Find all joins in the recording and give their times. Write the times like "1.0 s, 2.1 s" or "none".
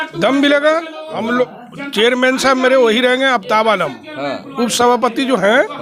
none